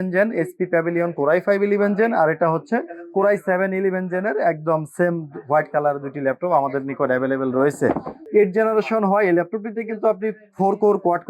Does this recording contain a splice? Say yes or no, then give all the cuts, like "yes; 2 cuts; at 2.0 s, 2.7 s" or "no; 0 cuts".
yes; 1 cut; at 8.1 s